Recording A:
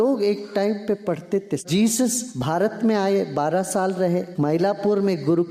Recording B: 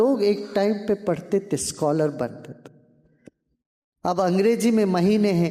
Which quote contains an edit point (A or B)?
A